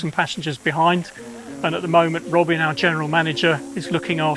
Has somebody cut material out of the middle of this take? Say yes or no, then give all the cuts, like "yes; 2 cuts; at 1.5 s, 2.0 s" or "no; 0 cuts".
no; 0 cuts